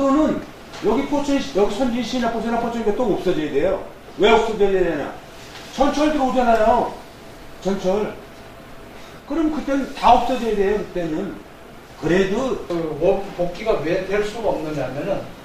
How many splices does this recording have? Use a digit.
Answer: 1